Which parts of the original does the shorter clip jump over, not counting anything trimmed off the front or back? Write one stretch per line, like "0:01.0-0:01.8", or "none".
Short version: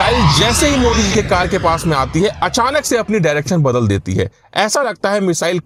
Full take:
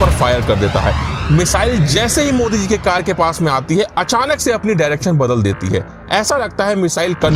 none